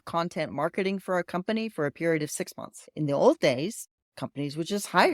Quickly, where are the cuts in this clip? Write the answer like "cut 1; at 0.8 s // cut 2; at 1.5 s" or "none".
cut 1; at 2.8 s